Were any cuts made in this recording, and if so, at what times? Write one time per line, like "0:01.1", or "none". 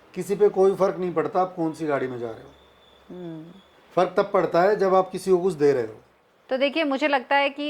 none